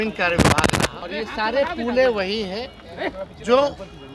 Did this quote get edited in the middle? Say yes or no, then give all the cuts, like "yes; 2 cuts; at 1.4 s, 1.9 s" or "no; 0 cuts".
yes; 1 cut; at 1.1 s